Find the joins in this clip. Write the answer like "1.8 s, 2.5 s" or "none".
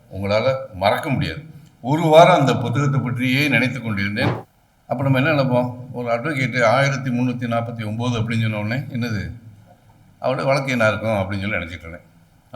4.4 s